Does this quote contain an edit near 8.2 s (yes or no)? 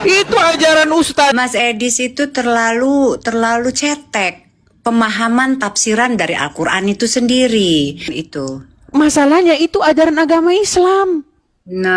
yes